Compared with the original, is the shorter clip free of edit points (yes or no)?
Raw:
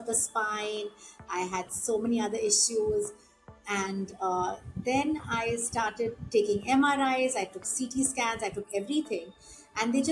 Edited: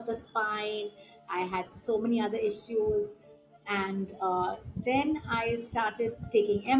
yes